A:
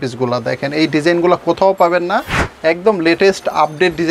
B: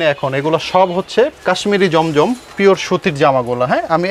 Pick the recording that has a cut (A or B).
B